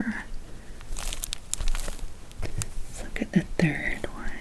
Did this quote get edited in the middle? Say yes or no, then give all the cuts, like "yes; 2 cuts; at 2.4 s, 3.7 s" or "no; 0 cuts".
yes; 1 cut; at 0.9 s